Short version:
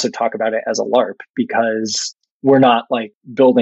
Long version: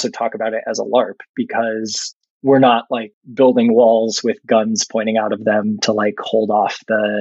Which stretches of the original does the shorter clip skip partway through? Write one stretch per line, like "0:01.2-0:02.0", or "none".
none